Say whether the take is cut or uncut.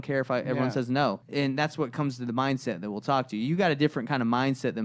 cut